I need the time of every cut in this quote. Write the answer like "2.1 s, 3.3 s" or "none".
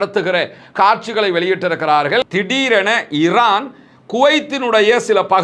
2.3 s